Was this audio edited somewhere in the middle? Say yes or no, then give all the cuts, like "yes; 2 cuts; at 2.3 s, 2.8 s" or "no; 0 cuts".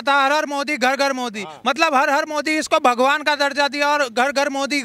no; 0 cuts